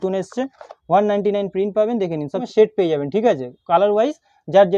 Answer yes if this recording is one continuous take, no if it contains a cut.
no